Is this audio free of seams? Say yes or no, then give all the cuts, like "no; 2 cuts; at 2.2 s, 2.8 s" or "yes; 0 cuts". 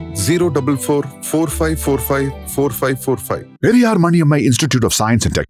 yes; 0 cuts